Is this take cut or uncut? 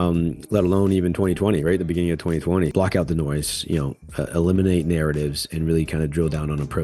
cut